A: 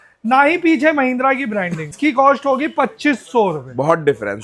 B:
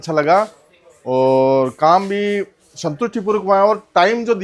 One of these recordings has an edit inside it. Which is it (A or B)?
A